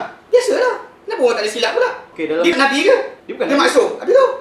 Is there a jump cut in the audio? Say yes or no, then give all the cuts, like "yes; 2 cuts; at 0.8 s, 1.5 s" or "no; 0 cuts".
no; 0 cuts